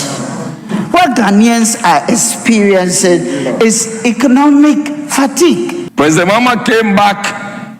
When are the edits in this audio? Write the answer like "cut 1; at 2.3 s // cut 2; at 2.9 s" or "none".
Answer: cut 1; at 5.8 s